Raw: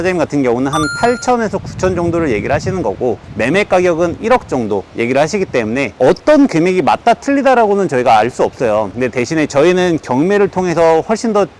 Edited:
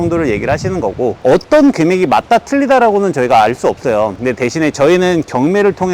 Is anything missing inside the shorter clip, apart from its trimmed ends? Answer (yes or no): yes